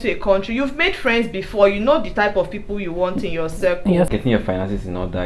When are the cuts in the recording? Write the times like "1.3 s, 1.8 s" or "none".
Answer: 4.1 s